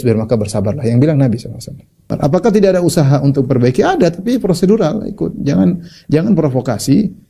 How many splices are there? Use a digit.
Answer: 1